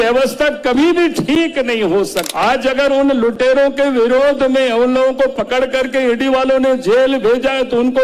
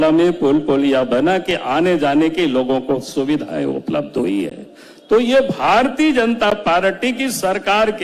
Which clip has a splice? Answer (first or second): first